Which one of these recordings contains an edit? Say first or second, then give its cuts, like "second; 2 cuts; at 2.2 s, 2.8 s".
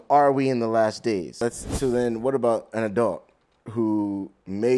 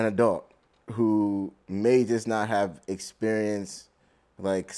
first; 1 cut; at 1.4 s